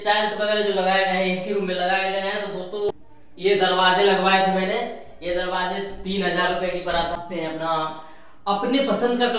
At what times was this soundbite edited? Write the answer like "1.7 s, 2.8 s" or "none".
2.9 s, 7.2 s